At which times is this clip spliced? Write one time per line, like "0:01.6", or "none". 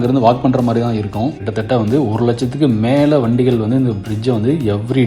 0:01.4